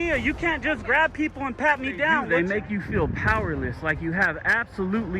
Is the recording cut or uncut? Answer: cut